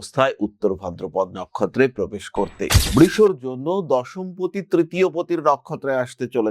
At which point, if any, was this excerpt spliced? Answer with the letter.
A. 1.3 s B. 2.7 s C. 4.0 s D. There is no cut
B